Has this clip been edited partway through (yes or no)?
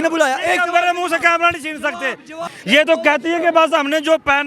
yes